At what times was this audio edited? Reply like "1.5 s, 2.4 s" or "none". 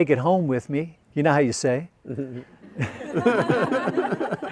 1.0 s